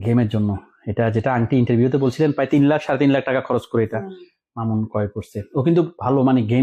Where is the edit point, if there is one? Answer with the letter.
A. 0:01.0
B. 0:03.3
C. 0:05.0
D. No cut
D